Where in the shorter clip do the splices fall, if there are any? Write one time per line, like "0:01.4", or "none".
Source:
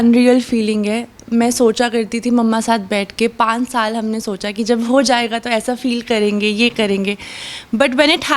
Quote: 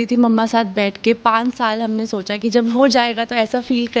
none